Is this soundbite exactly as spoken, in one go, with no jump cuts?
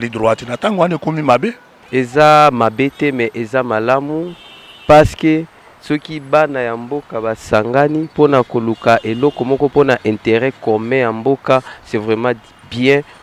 no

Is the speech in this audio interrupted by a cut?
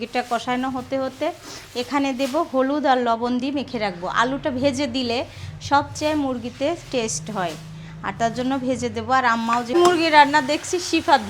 yes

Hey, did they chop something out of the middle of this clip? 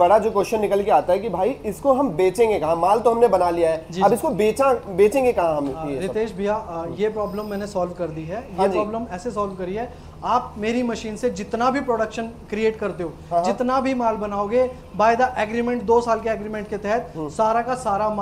no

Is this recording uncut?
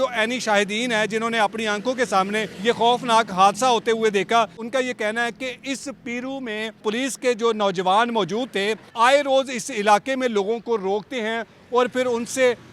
no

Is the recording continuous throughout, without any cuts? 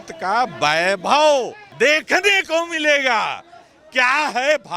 no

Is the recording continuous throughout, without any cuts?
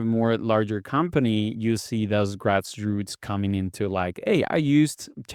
yes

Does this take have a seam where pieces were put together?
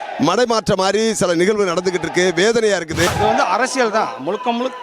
yes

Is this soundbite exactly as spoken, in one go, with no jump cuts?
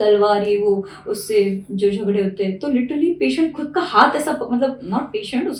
yes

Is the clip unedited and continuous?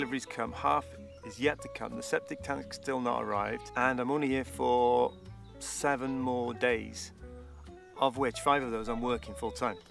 yes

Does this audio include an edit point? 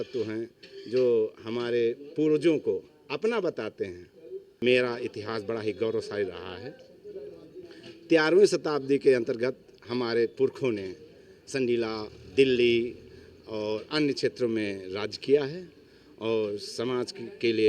yes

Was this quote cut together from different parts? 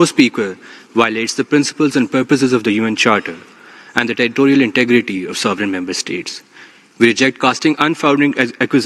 no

